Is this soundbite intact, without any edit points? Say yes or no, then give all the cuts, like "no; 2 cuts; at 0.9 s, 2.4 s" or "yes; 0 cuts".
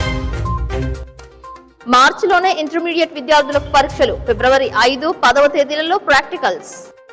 no; 1 cut; at 1.7 s